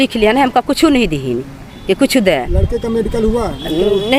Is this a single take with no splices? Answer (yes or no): yes